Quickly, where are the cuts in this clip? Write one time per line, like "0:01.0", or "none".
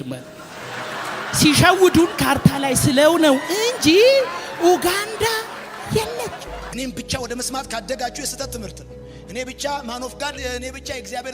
0:06.7